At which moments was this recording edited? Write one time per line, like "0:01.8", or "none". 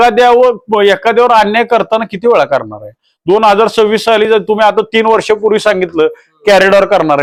none